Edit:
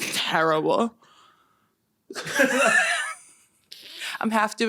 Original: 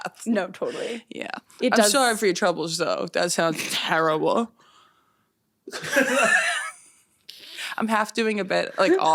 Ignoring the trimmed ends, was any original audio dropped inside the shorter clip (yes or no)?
no